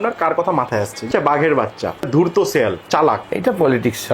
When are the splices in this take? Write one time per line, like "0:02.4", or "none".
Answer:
0:01.1
0:02.1
0:02.8